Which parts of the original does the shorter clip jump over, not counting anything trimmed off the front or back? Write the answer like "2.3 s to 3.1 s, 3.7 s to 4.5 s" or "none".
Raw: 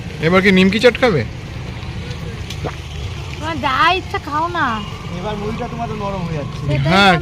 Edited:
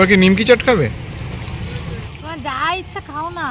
2.4 s to 3.3 s